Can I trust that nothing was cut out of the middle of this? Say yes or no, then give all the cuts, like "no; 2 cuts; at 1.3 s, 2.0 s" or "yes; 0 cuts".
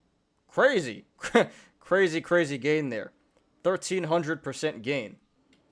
yes; 0 cuts